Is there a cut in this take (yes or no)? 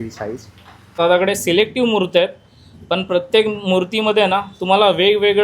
yes